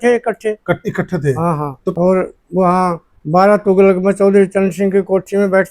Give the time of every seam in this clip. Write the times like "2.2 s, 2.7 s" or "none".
1.9 s